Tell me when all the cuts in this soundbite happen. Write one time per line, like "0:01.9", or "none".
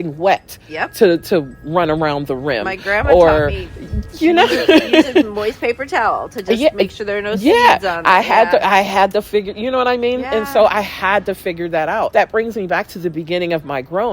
0:12.1